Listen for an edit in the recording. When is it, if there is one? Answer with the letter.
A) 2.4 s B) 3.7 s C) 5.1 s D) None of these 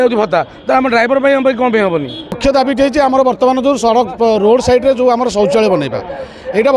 A